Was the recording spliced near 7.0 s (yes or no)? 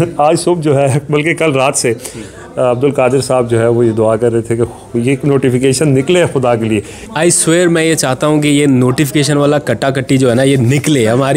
yes